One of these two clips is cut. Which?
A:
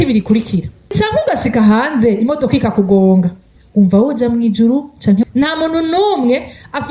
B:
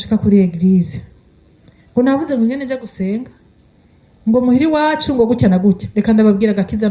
A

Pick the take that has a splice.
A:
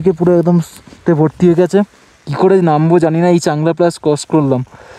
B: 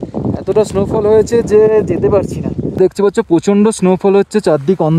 B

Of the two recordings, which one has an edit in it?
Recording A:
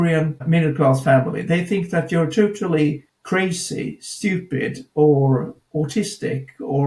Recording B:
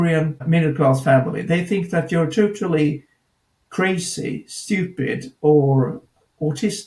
A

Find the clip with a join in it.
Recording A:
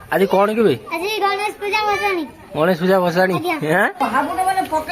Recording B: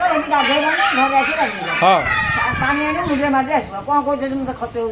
A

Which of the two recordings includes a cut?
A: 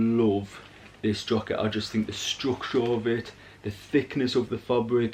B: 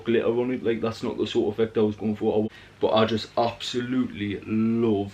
B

